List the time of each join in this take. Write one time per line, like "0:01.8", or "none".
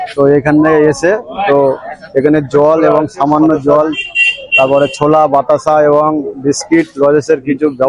none